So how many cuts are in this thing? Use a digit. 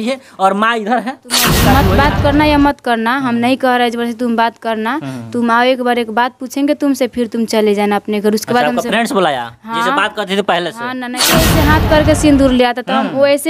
2